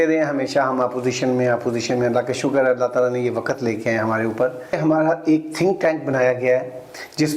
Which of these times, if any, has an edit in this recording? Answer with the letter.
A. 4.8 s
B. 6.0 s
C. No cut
A